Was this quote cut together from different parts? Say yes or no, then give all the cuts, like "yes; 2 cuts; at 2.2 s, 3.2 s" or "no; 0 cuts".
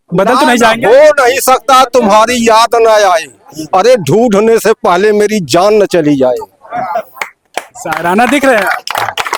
no; 0 cuts